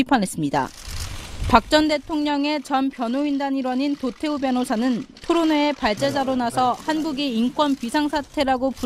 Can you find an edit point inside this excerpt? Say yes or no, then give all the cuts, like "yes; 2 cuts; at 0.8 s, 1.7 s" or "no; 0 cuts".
no; 0 cuts